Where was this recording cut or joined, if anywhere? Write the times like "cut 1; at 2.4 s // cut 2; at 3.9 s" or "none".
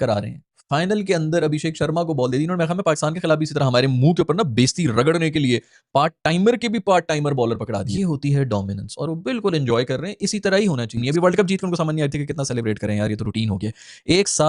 cut 1; at 7.9 s // cut 2; at 11.0 s